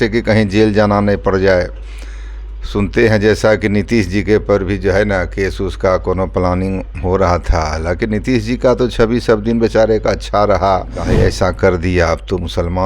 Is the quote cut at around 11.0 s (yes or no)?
yes